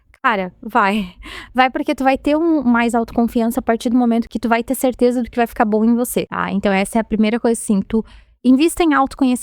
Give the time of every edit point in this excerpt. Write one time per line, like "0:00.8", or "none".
0:04.3
0:06.4